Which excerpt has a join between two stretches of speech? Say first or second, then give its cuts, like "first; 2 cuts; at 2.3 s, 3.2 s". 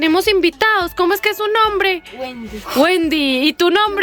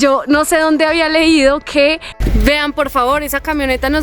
second; 1 cut; at 2.1 s